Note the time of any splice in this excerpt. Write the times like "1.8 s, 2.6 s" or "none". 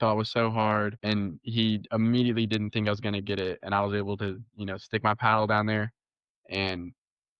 1.0 s